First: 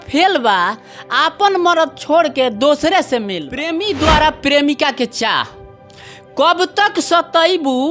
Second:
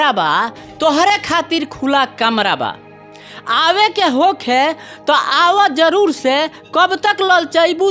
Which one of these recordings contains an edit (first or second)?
first